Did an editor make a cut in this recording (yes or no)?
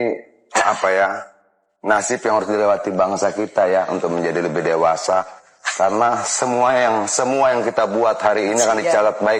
no